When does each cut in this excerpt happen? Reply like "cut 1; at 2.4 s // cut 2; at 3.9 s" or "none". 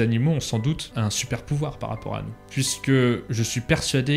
cut 1; at 0.9 s // cut 2; at 2.4 s // cut 3; at 3.3 s